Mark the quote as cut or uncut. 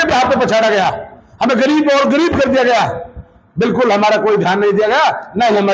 uncut